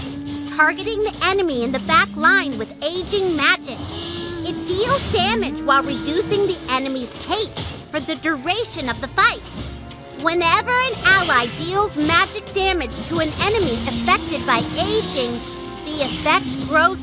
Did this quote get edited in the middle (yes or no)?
yes